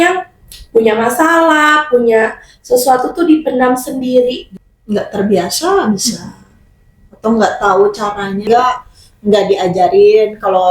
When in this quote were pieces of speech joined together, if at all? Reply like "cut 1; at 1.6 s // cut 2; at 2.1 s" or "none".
cut 1; at 4.4 s // cut 2; at 8.5 s

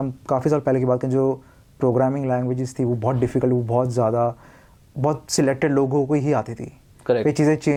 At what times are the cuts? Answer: none

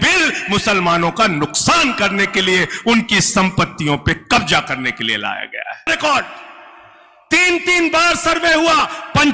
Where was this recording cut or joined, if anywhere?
cut 1; at 5.4 s

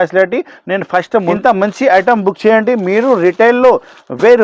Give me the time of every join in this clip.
cut 1; at 1.3 s

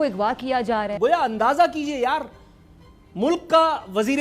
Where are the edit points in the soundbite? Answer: cut 1; at 0.9 s

